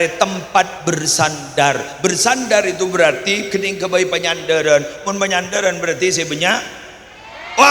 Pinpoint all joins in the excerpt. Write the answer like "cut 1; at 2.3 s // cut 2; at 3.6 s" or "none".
none

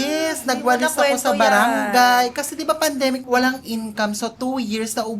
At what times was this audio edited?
cut 1; at 3.2 s

